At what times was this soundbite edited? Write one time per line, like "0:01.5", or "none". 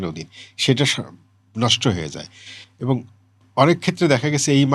none